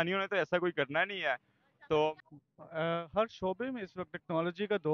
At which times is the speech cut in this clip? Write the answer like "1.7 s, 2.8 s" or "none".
2.2 s